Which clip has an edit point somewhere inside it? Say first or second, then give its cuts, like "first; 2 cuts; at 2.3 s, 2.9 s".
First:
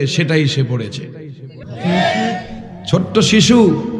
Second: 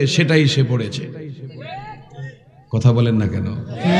first; 1 cut; at 1.6 s